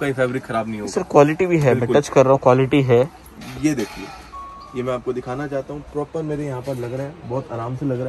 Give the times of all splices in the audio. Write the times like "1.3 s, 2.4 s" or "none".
3.5 s